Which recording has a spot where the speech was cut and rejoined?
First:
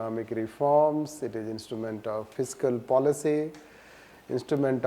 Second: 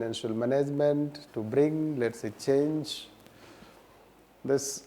first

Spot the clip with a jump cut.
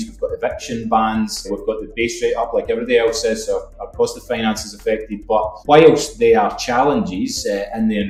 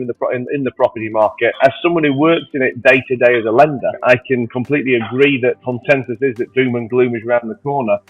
second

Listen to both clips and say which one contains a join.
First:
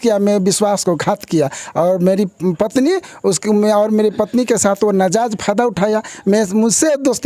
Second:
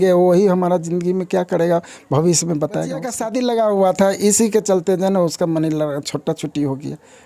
second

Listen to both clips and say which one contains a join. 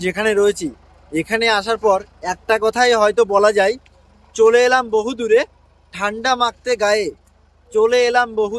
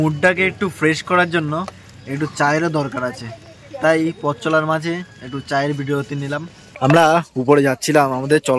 second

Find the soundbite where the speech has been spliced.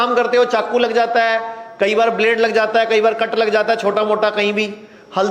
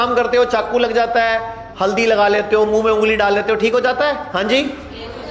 second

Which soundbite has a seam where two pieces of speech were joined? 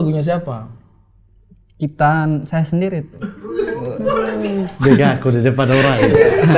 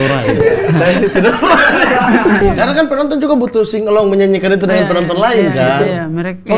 second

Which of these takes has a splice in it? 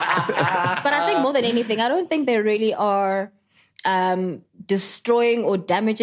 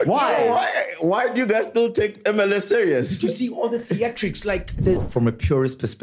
second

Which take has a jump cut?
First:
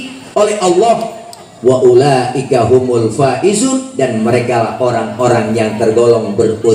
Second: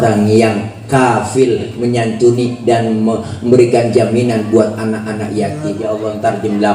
second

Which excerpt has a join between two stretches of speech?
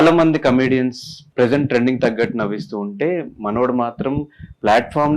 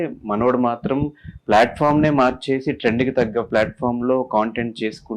first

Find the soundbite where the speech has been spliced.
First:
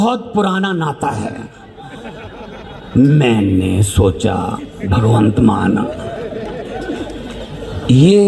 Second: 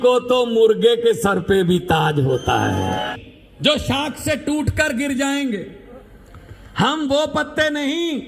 second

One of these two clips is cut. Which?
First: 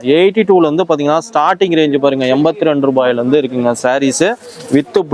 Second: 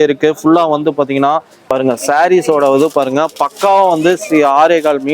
second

